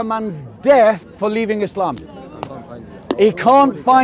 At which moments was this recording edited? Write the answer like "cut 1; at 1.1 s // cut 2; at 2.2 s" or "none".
cut 1; at 1.1 s